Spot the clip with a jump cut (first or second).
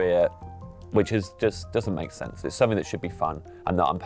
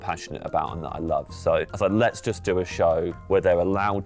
second